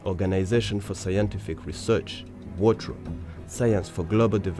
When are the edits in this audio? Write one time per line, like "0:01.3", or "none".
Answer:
0:01.6